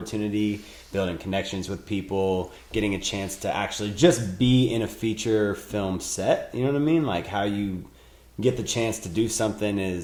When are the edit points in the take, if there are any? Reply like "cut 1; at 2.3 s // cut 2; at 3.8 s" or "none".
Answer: none